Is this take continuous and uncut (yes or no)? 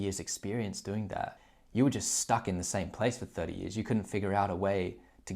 no